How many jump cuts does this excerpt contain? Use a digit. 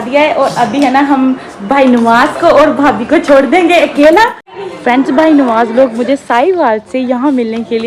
1